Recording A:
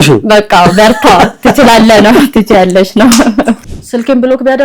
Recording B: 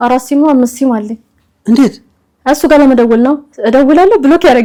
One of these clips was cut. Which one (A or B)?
A